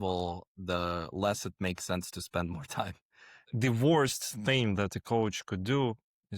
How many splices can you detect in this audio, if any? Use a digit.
1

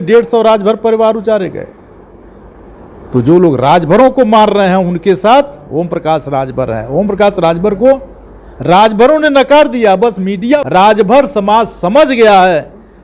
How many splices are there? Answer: 1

